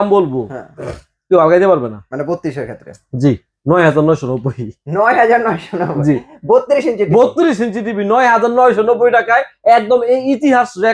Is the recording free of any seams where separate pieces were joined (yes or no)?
yes